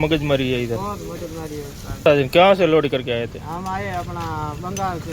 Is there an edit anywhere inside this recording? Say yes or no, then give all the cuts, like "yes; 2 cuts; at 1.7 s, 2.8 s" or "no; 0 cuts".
yes; 1 cut; at 2.1 s